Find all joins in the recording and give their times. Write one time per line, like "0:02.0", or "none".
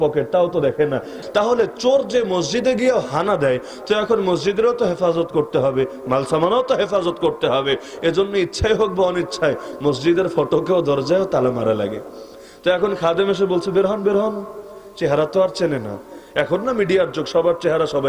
0:01.1